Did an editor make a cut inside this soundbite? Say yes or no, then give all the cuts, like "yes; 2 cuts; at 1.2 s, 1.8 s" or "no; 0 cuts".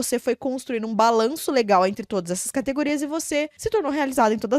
yes; 1 cut; at 3.5 s